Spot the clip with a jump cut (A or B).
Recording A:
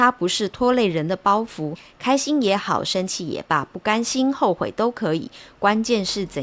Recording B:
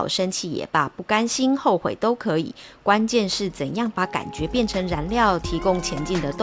A